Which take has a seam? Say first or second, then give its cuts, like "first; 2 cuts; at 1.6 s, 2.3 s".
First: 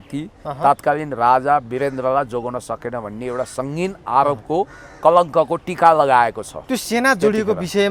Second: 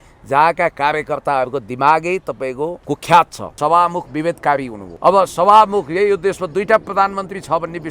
second; 3 cuts; at 2.8 s, 3.6 s, 4.8 s